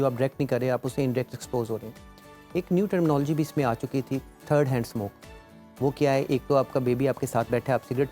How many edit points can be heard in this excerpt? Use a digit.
0